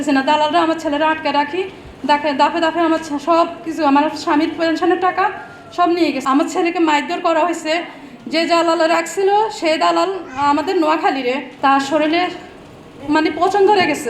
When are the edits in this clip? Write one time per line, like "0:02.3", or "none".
0:06.2
0:11.5